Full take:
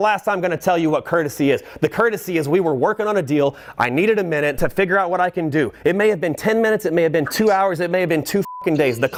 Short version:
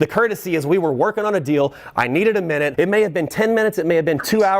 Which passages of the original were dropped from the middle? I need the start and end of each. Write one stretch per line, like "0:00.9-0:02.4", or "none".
0:04.5-0:05.8